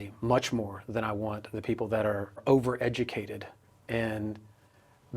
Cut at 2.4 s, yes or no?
yes